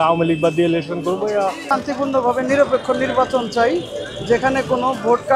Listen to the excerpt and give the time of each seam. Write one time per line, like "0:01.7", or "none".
0:01.6

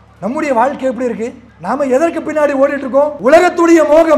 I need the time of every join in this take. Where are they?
0:01.5
0:03.1

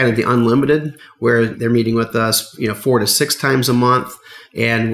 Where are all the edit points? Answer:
0:01.3

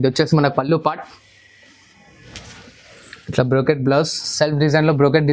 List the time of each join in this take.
none

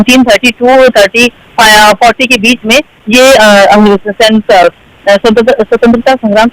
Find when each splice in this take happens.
none

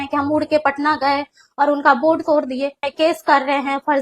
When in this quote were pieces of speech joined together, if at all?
0:02.8

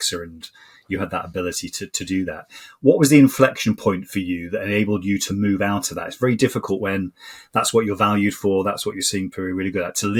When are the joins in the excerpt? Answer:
none

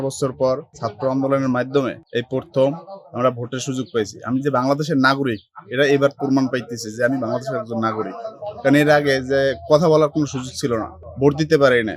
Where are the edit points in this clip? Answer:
none

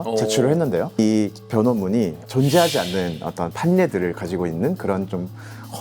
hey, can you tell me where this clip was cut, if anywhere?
0:01.0

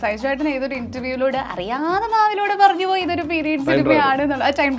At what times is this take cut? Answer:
none

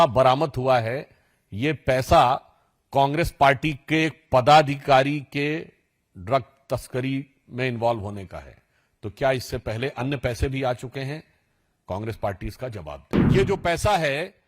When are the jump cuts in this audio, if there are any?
0:13.1

